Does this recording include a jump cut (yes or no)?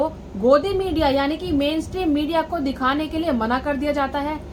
no